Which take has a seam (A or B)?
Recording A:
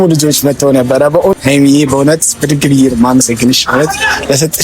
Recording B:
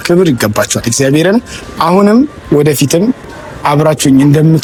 A